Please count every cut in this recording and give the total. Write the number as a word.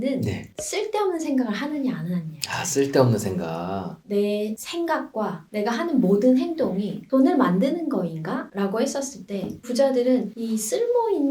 zero